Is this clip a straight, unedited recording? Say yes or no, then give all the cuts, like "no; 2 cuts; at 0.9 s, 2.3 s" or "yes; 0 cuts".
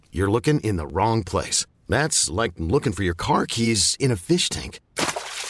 yes; 0 cuts